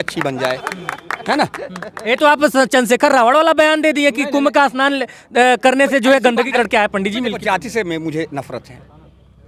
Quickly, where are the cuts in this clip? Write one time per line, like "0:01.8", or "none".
0:06.5